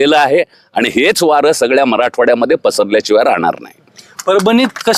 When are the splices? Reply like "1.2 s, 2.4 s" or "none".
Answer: none